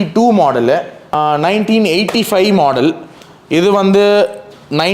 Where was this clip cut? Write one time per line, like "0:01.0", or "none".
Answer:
0:01.1